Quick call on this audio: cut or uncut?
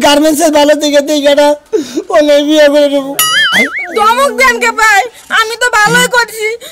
cut